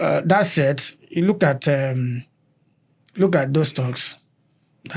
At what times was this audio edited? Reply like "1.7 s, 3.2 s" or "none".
none